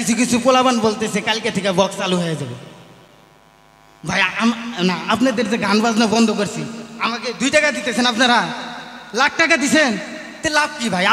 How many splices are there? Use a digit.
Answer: 0